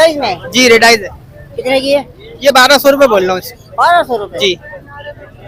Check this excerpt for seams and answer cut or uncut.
uncut